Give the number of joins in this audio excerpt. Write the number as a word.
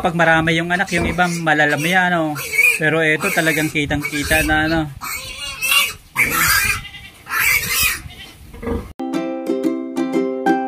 one